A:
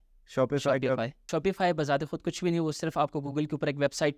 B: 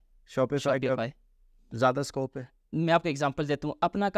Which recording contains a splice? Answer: A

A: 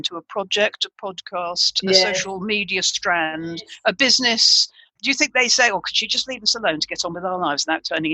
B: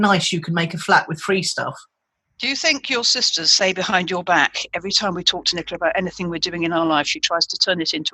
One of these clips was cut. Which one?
A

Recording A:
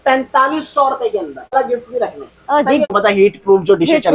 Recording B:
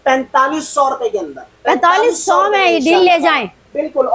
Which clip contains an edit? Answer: A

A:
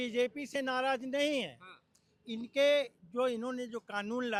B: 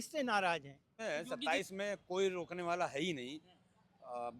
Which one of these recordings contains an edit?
B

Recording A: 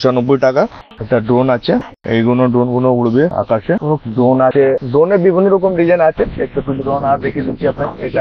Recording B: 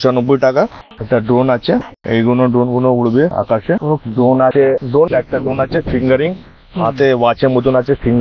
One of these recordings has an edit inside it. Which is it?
B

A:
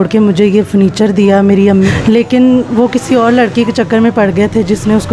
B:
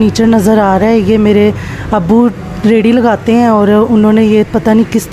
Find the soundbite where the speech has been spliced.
A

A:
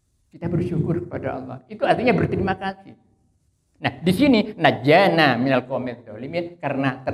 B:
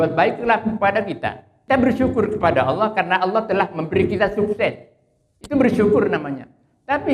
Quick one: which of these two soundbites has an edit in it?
B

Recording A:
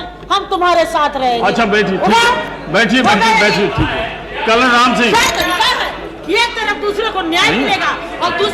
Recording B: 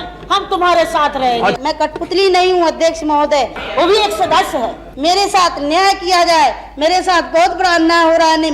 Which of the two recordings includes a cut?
B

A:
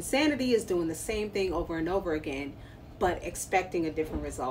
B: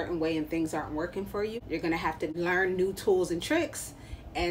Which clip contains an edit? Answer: B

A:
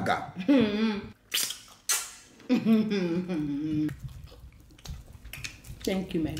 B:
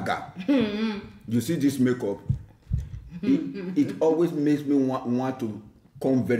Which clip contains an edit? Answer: A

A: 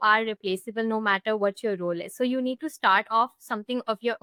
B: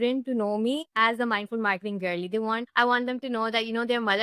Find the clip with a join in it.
B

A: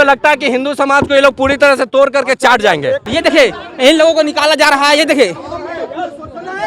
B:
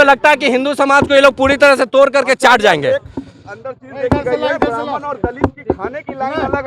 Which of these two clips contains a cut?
A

